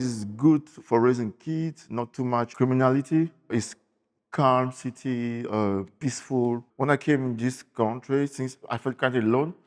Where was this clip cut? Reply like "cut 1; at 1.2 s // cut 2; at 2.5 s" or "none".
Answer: cut 1; at 2.5 s // cut 2; at 3.5 s // cut 3; at 6.7 s